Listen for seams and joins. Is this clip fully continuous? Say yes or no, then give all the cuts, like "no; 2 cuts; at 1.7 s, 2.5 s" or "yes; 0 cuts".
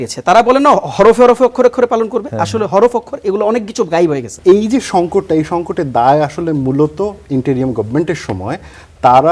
no; 1 cut; at 4.3 s